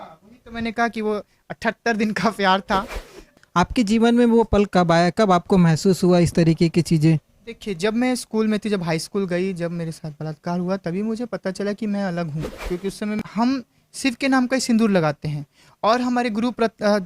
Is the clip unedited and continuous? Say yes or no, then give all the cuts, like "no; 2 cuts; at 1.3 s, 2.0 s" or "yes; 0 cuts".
no; 2 cuts; at 3.3 s, 13.2 s